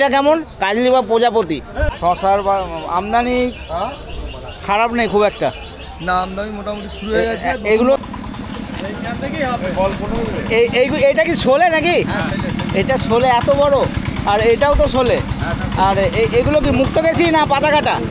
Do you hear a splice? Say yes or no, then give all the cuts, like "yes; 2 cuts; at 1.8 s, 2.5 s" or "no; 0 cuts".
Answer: yes; 2 cuts; at 1.9 s, 8.0 s